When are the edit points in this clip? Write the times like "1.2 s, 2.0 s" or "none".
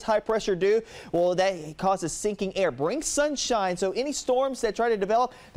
none